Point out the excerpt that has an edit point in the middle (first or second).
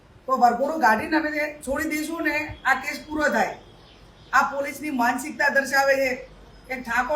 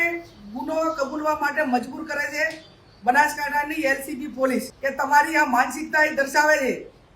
second